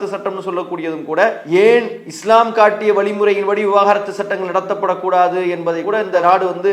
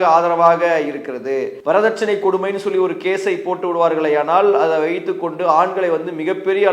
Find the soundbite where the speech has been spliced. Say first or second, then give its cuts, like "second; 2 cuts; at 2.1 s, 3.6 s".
second; 1 cut; at 1.5 s